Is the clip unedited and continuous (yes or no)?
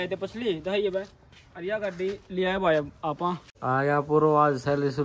no